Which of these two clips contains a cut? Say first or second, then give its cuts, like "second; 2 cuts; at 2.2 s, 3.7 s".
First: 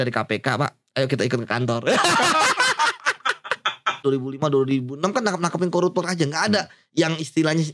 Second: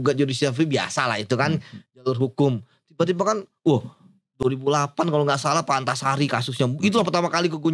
first; 1 cut; at 4.0 s